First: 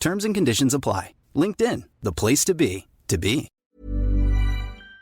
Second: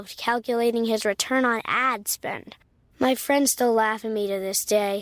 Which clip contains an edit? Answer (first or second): first